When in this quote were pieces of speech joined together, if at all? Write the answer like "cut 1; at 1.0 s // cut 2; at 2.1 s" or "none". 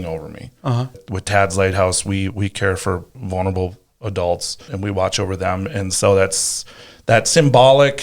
cut 1; at 1.0 s // cut 2; at 3.2 s // cut 3; at 4.7 s